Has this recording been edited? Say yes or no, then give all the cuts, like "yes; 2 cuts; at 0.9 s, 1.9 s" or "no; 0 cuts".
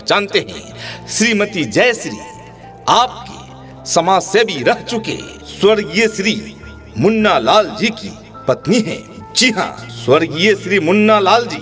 no; 0 cuts